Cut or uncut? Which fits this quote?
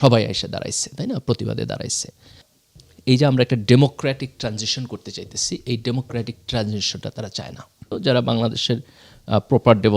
cut